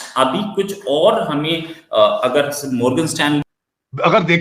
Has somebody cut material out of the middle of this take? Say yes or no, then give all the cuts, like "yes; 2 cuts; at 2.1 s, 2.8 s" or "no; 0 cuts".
yes; 1 cut; at 3.4 s